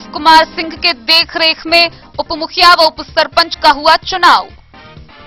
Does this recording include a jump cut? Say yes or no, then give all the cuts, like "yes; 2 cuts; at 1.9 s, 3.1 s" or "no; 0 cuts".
no; 0 cuts